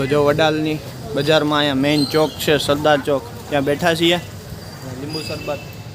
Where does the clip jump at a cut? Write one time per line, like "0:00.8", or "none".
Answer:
none